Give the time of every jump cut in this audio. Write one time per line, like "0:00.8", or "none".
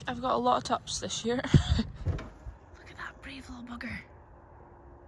0:02.1